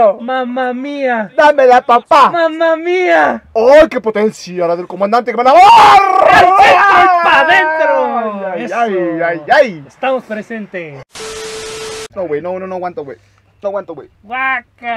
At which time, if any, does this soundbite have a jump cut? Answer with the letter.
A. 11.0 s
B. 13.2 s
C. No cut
A